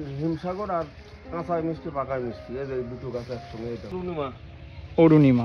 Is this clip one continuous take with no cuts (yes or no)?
no